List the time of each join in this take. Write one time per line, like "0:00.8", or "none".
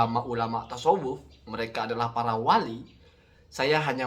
none